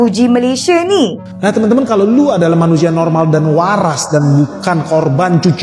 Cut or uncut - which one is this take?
cut